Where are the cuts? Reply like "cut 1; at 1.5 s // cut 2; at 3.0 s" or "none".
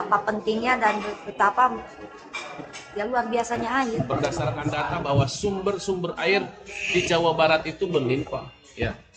cut 1; at 4.0 s